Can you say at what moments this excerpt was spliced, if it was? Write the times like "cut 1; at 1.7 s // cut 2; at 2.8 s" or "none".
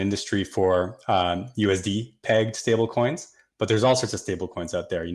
none